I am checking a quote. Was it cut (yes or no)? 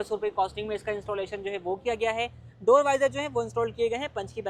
no